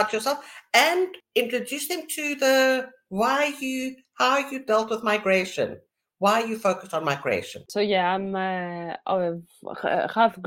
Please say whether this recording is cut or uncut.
cut